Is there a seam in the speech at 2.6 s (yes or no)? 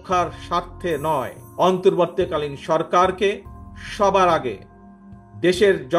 no